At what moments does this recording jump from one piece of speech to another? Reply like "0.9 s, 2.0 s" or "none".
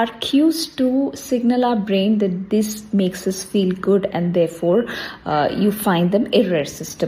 none

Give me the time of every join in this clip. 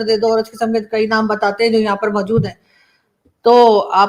none

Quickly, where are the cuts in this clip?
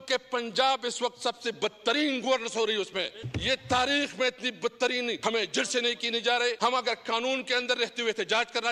3.2 s, 5.2 s, 6.6 s

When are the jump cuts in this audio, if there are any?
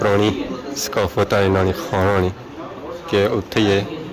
none

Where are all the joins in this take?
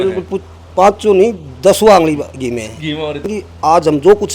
3.3 s

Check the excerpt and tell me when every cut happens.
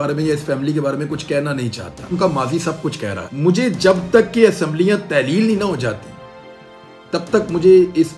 2.1 s, 3.3 s

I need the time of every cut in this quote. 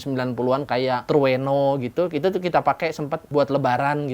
1.0 s, 3.2 s

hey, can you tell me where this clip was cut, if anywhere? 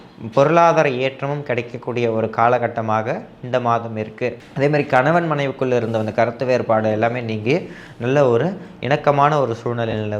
4.4 s

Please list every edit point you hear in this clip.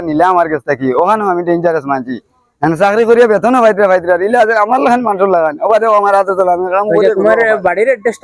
7.1 s

